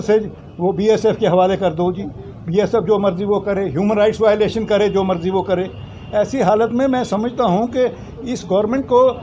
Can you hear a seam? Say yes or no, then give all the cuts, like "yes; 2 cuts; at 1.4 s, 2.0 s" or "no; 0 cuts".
no; 0 cuts